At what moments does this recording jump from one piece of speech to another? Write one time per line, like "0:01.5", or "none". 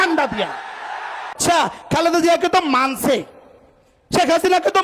0:01.4